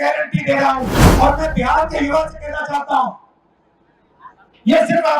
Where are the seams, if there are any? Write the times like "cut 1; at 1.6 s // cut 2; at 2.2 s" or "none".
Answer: cut 1; at 1.0 s